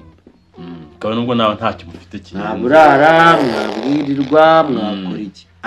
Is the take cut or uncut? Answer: uncut